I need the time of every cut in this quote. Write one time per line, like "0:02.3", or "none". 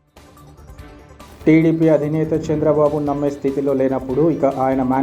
0:01.1

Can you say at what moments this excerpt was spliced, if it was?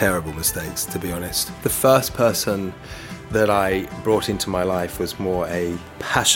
0:01.4

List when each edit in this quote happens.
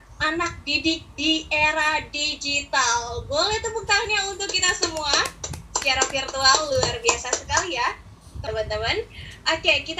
0:08.4

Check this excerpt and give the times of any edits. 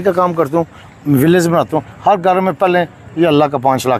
none

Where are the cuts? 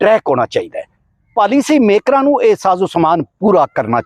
0:01.3

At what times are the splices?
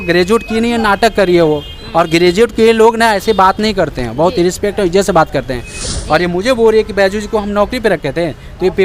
0:05.9

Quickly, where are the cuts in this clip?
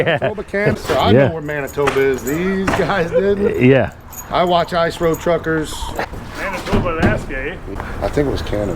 0:00.8
0:06.1
0:07.6

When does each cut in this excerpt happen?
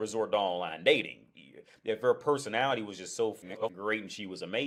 none

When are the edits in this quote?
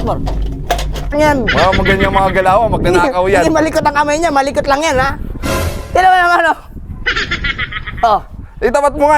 0:01.1

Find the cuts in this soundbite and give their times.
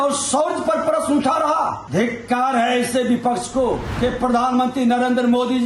0:01.8
0:03.9

